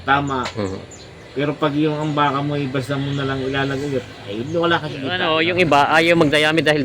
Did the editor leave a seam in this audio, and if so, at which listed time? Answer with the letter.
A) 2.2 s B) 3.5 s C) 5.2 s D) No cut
C